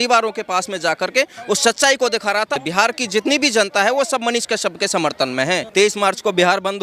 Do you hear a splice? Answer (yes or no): yes